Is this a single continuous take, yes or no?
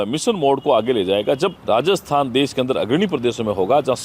no